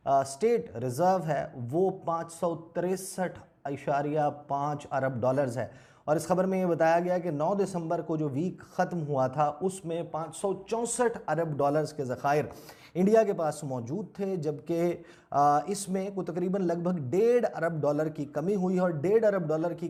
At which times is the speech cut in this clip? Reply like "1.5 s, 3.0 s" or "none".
none